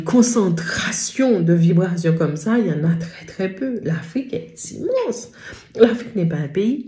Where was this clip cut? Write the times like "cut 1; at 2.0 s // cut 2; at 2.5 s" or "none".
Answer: none